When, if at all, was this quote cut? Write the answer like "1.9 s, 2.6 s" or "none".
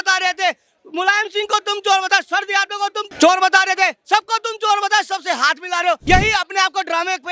3.0 s, 6.0 s